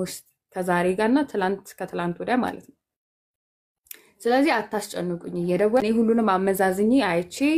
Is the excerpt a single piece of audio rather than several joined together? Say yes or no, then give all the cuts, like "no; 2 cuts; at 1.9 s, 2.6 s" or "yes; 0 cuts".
no; 1 cut; at 5.8 s